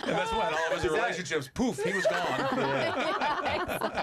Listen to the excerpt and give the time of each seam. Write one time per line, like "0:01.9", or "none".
none